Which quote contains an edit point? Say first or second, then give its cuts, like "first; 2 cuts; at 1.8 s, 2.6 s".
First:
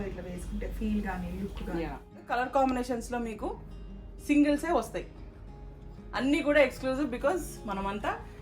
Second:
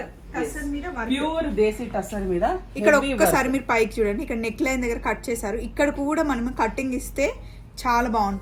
first; 1 cut; at 2.1 s